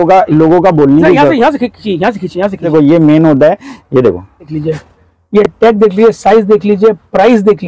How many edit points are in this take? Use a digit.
2